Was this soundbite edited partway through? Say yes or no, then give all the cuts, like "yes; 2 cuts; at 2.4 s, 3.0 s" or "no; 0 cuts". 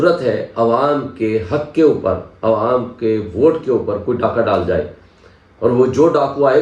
no; 0 cuts